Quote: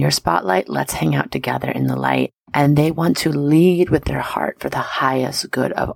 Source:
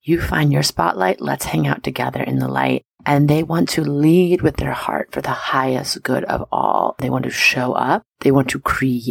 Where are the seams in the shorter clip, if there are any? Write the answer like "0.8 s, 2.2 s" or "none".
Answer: none